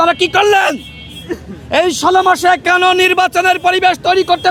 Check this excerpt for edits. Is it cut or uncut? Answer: uncut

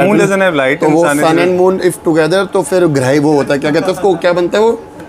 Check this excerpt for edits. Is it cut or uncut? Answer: uncut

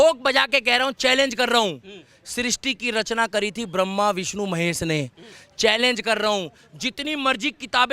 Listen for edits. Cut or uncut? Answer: uncut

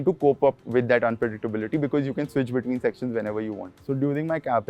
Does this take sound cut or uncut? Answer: cut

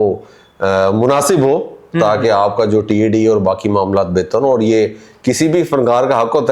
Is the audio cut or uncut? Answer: uncut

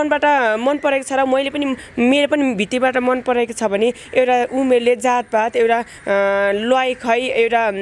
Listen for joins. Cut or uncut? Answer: uncut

